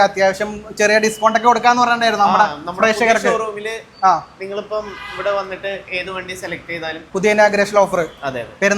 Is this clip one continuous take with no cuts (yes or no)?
no